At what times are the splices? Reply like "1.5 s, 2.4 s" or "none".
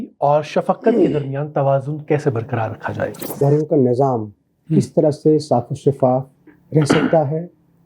3.4 s

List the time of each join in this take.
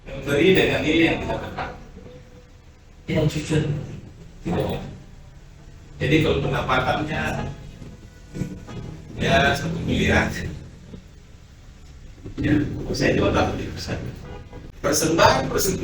14.6 s

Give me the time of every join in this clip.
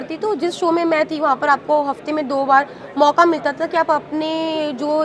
none

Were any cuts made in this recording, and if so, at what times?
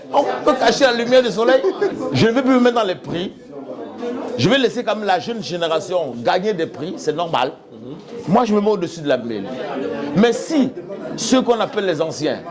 1.9 s

